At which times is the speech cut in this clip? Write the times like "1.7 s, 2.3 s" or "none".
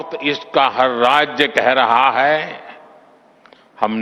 none